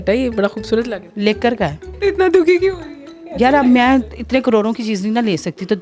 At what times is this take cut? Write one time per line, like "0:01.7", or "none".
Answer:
0:01.0
0:01.8